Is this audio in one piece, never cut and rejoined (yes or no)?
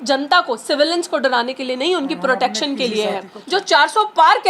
no